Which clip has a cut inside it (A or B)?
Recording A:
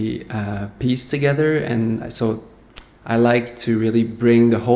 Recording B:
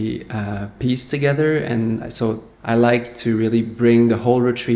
B